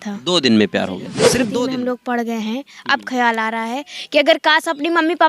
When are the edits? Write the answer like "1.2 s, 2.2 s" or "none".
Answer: 1.3 s